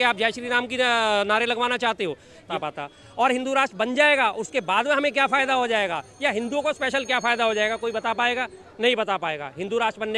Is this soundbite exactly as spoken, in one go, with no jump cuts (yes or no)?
no